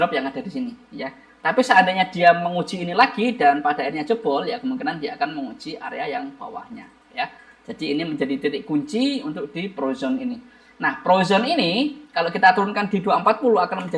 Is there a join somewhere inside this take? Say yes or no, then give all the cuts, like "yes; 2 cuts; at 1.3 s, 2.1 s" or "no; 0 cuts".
no; 0 cuts